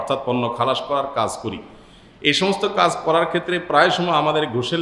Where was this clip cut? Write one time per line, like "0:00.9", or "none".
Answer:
none